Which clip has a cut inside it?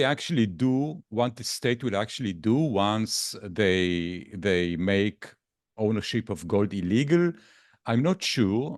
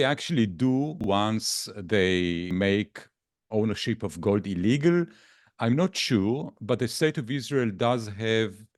second; 2 cuts; at 1.0 s, 2.5 s

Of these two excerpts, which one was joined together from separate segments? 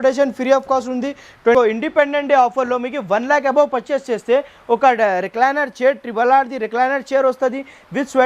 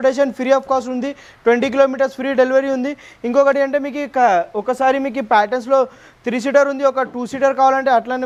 first; 1 cut; at 1.5 s

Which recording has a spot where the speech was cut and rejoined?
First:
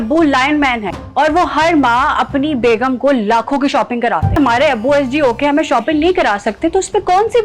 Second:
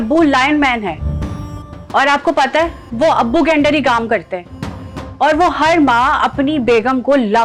first; 2 cuts; at 1.0 s, 4.4 s

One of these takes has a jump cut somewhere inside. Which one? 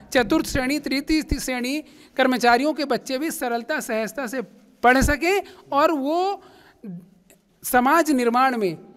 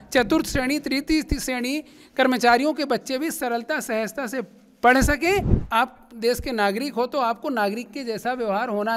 second; 1 cut; at 5.6 s

